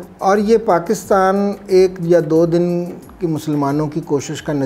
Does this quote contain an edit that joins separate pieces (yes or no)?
no